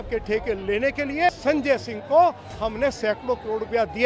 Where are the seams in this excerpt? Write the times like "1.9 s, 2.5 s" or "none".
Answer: 1.3 s